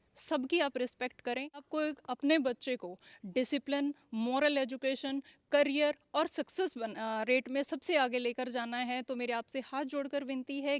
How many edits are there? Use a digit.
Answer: 1